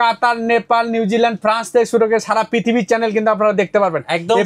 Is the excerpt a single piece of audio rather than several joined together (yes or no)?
yes